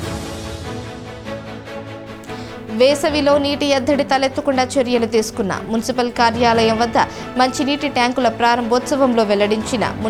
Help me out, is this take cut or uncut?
uncut